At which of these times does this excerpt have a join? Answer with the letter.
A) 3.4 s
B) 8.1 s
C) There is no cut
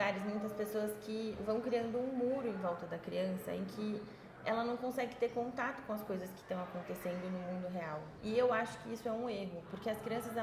B